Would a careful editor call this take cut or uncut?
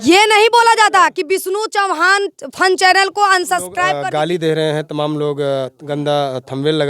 cut